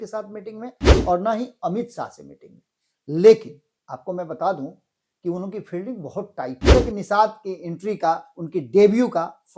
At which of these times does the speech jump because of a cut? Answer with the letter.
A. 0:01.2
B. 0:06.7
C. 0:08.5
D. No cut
B